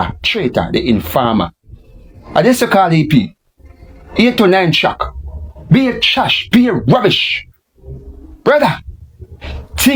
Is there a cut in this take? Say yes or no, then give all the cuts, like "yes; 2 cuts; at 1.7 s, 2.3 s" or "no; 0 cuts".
no; 0 cuts